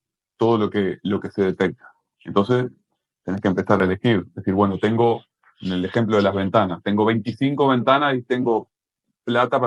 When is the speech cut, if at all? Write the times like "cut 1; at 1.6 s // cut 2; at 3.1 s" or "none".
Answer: none